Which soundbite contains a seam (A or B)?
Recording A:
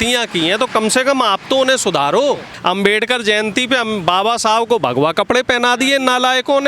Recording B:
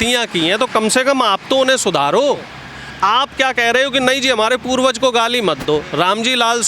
A